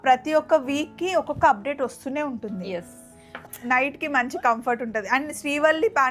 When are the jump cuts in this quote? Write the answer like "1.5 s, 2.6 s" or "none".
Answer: 3.5 s